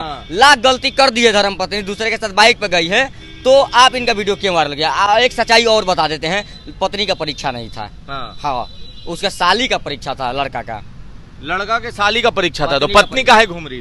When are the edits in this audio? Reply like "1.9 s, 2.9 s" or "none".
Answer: none